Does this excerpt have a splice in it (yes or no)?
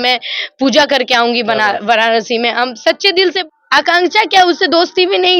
yes